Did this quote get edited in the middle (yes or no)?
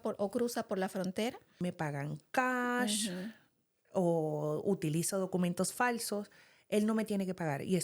yes